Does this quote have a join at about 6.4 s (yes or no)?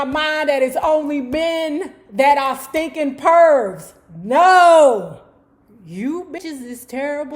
yes